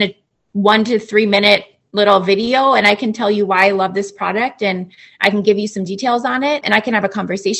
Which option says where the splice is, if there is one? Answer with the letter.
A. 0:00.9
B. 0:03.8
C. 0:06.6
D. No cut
C